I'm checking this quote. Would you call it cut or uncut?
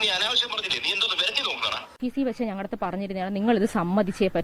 cut